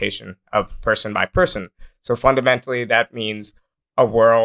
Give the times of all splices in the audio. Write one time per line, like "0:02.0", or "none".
none